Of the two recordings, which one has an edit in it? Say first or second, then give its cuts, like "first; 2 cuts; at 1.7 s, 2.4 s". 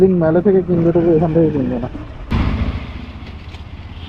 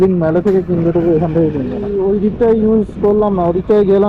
second; 1 cut; at 1.9 s